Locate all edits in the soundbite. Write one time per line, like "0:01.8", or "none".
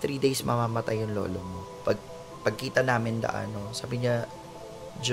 0:01.7